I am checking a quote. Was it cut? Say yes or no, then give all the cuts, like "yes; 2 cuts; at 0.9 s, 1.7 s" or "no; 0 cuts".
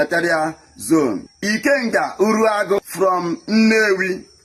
yes; 2 cuts; at 1.3 s, 2.8 s